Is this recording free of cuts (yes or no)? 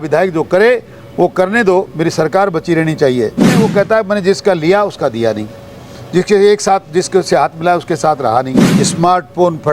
no